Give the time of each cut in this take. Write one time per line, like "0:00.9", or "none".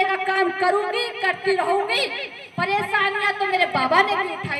none

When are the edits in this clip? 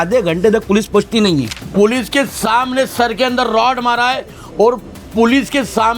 0:01.5

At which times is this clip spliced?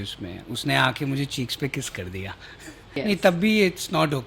0:03.0

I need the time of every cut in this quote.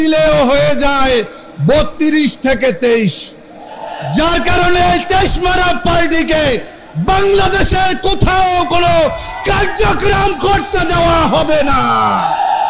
none

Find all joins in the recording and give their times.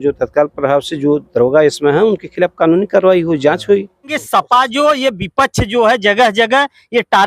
0:04.2

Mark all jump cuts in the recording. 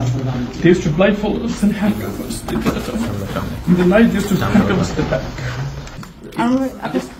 0:06.1

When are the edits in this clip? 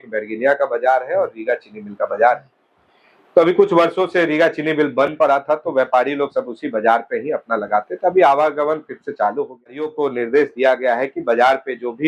0:09.8

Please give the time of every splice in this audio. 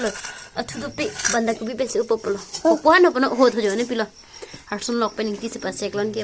none

